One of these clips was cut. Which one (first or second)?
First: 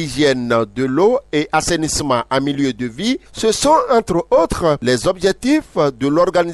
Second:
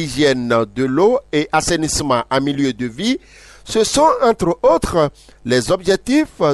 first